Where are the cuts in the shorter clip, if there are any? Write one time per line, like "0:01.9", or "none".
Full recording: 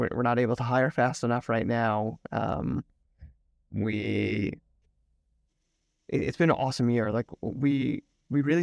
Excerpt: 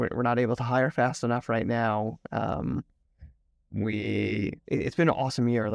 0:04.6

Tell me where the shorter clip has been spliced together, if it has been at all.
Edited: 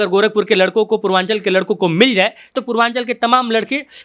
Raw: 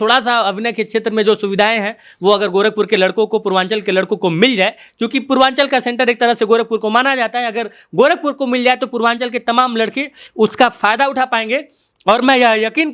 0:02.5

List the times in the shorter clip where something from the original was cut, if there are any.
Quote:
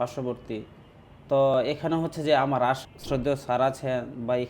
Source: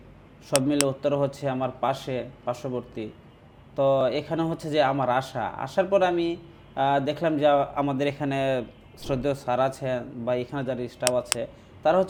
0:02.9

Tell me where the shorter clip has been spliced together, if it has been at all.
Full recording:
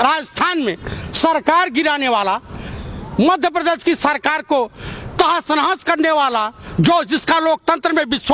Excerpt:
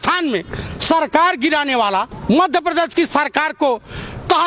0:02.1

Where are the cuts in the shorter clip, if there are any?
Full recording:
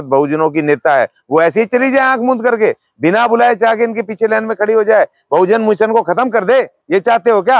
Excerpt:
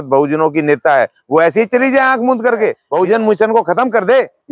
0:02.8

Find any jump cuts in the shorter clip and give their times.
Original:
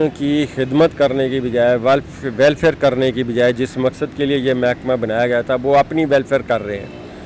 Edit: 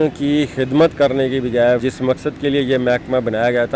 0:01.8

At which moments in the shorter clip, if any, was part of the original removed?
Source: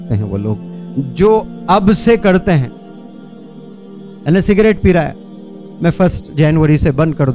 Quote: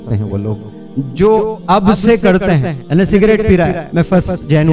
0:02.7
0:03.8

